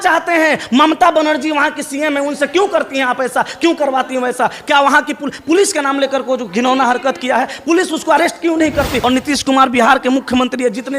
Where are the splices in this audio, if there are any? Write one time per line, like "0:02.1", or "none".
0:09.0